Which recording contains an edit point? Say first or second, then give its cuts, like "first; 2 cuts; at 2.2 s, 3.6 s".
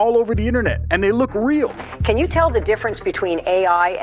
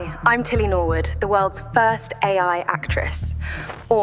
first; 1 cut; at 1.8 s